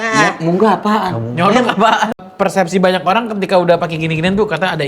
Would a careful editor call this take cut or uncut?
cut